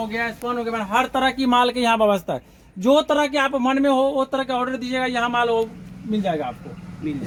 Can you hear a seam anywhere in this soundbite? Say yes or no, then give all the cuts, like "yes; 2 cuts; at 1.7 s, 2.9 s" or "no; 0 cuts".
no; 0 cuts